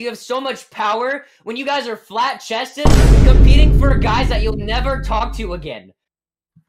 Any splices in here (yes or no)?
no